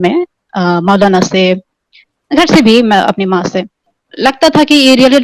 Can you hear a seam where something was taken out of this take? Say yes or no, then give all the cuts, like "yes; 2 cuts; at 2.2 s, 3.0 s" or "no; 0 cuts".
yes; 1 cut; at 3.9 s